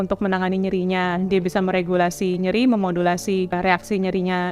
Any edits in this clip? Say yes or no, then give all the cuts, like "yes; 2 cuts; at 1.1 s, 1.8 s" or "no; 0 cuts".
yes; 1 cut; at 3.5 s